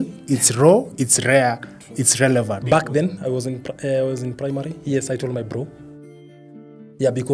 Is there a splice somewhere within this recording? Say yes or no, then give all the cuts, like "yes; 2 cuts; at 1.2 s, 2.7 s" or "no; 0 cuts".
no; 0 cuts